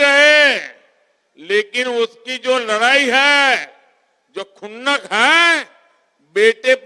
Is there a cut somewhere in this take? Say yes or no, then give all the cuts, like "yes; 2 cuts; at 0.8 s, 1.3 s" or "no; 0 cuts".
no; 0 cuts